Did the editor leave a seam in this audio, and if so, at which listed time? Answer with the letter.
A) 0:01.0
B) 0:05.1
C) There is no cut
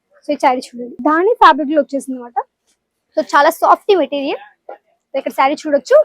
A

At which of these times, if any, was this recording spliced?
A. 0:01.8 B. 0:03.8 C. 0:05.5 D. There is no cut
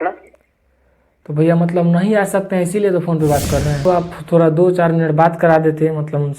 B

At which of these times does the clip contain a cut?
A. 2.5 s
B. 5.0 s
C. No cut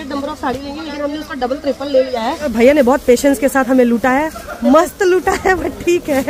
A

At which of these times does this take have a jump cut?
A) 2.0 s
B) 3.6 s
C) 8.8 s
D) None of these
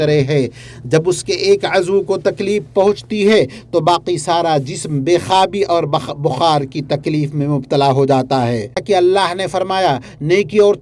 C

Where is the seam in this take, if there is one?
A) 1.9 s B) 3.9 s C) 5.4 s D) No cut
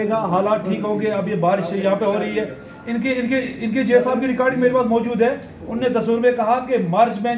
D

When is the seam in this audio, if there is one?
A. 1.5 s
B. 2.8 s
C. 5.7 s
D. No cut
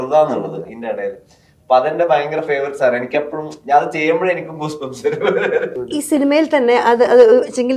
C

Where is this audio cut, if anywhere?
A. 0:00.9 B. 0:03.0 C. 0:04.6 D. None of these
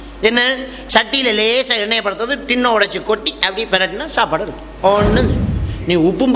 C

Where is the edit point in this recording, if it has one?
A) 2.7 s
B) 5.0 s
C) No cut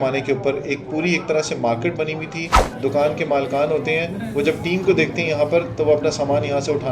A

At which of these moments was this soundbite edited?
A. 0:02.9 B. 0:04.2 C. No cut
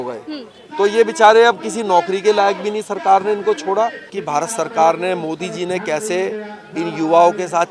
B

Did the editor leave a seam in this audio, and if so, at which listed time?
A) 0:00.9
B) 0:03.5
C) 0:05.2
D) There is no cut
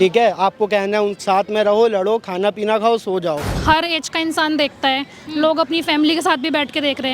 B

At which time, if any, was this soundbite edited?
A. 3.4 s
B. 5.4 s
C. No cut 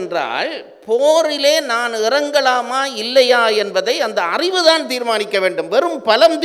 C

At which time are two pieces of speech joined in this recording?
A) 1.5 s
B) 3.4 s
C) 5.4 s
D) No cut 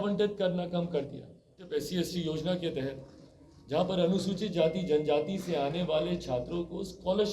A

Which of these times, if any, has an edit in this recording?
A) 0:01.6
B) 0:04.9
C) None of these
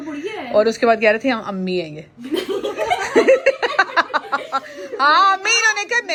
C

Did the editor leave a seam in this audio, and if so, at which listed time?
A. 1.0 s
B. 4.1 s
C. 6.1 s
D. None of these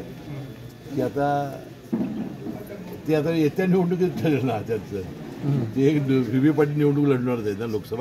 D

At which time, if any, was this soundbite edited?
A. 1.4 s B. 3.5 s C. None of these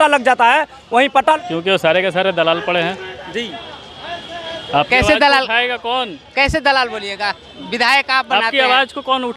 A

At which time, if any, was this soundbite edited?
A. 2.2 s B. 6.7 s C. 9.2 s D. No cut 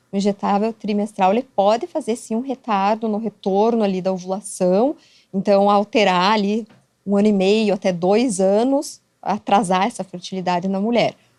D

